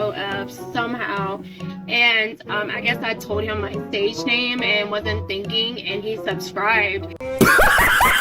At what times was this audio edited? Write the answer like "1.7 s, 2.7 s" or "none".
7.2 s